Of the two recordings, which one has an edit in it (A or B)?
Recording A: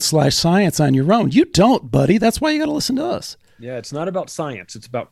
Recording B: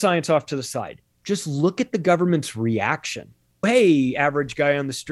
B